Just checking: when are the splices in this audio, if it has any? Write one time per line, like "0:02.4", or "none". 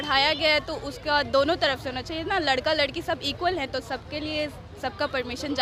none